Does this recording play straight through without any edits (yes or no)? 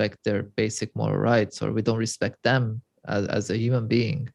yes